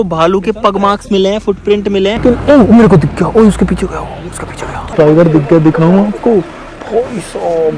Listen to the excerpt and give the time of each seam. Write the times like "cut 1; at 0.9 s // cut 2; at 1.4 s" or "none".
cut 1; at 2.2 s // cut 2; at 4.9 s